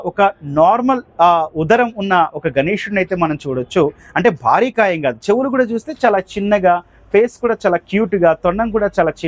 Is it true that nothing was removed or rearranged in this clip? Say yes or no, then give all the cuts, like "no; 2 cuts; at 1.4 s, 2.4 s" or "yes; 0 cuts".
yes; 0 cuts